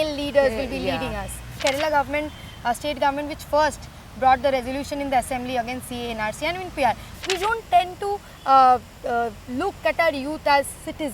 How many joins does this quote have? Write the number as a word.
two